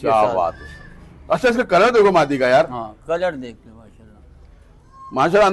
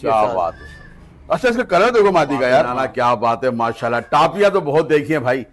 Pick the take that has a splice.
second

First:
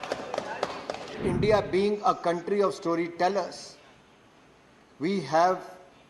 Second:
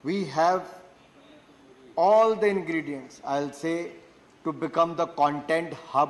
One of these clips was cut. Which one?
first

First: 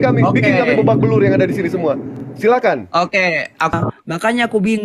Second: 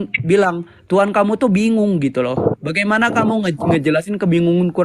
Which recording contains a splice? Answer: first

